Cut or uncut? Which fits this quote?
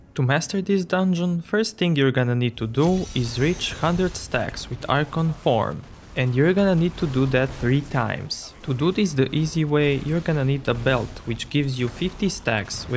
cut